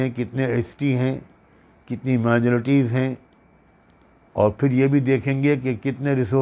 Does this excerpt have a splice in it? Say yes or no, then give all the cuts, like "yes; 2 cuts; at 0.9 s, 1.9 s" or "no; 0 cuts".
no; 0 cuts